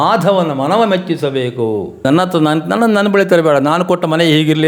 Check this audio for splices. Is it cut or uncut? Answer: cut